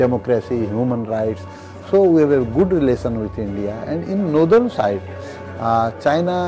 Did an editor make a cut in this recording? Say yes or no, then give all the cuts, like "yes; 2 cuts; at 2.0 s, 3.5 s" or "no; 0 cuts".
no; 0 cuts